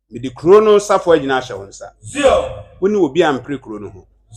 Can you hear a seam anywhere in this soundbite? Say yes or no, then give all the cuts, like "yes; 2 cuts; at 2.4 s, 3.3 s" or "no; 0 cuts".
no; 0 cuts